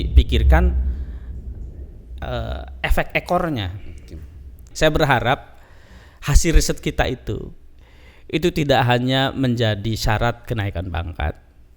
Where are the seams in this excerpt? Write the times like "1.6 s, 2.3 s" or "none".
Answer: 4.6 s